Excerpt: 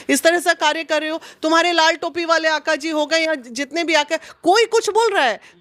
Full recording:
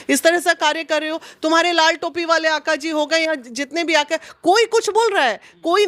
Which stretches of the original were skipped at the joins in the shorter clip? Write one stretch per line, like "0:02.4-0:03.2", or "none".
none